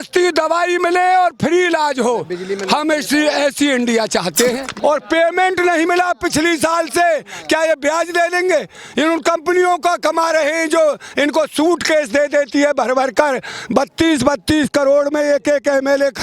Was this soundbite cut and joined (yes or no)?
yes